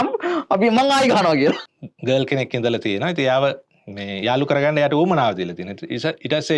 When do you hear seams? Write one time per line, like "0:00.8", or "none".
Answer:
0:01.7

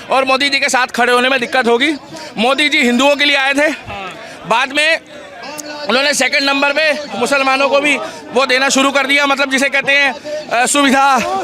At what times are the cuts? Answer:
none

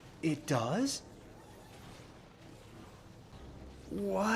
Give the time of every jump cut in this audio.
0:03.3

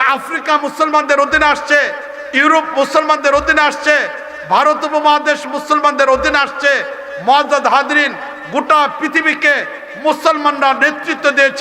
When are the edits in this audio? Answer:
none

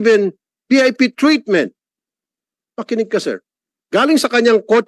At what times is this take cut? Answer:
none

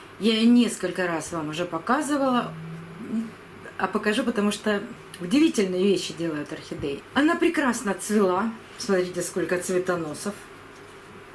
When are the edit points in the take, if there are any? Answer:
0:07.0

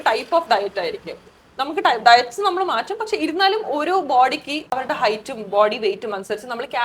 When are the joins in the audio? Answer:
0:04.8

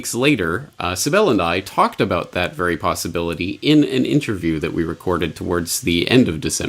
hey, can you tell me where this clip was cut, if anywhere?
0:01.2

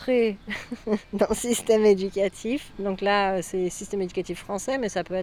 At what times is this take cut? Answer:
none

